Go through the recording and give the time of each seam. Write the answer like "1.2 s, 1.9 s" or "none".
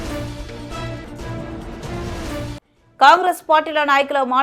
none